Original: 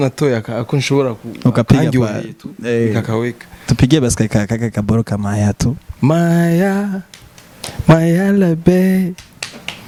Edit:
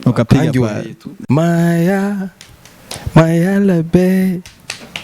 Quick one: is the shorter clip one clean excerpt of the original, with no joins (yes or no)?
no